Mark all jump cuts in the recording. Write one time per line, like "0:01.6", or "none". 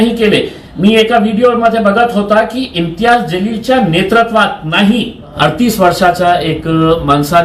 0:05.3